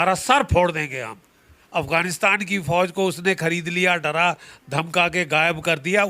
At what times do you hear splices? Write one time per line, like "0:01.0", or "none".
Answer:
0:01.6

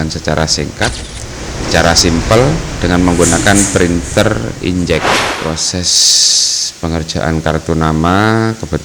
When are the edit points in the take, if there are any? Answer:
0:05.3

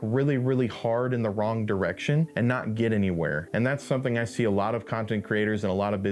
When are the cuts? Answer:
0:02.3
0:03.4

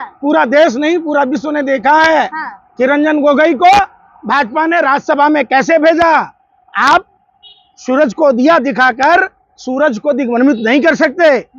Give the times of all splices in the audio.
none

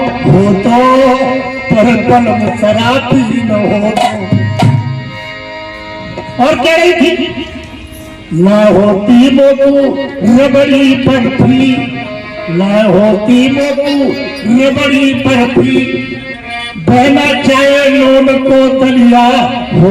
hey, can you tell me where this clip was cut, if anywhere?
none

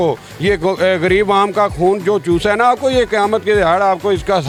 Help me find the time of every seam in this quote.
none

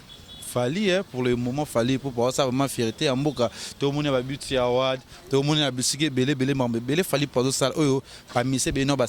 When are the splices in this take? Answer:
none

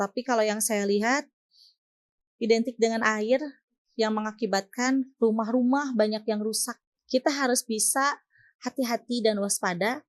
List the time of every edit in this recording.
0:06.9

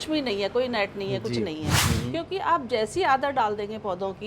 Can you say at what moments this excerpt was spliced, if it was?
0:01.8

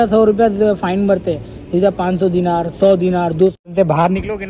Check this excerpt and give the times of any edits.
0:03.6

